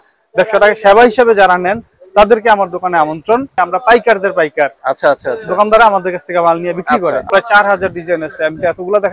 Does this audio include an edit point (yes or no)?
yes